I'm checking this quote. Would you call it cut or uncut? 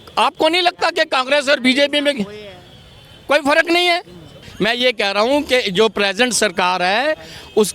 cut